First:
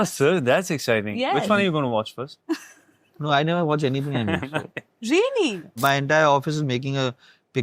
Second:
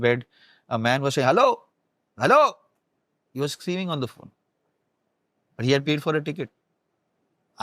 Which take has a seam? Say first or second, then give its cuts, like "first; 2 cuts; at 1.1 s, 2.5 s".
first; 1 cut; at 5.8 s